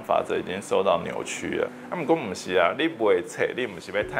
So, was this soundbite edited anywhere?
no; 0 cuts

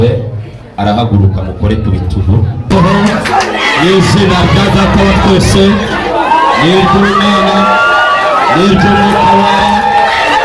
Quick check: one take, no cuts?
no; 1 cut; at 2.7 s

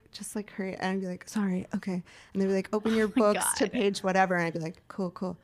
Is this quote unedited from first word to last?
yes; 0 cuts

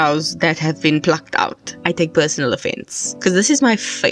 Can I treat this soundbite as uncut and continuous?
no; 1 cut; at 1.8 s

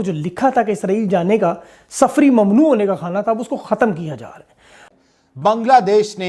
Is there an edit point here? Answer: yes; 1 cut; at 4.8 s

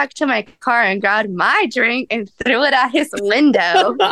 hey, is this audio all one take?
yes; 0 cuts

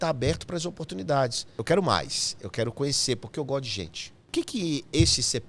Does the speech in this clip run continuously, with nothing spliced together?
no; 2 cuts; at 1.6 s, 4.3 s

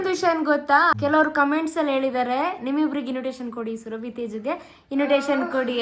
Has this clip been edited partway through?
yes; 1 cut; at 0.9 s

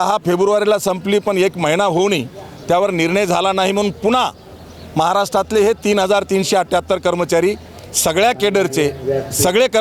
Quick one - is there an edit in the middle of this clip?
no; 0 cuts

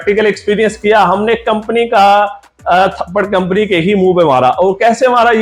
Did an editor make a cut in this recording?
no; 0 cuts

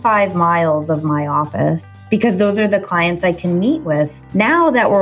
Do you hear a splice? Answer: no; 0 cuts

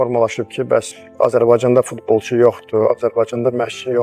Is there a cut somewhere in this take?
yes; 1 cut; at 1.0 s

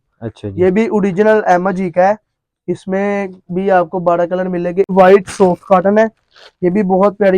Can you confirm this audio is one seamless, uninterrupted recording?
no; 1 cut; at 4.9 s

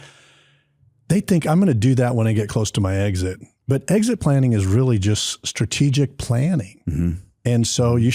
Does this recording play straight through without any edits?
yes; 0 cuts

